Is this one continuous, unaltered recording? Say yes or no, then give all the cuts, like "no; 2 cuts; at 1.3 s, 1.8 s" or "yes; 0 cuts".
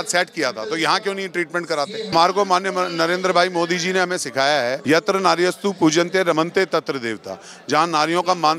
no; 2 cuts; at 2.1 s, 4.8 s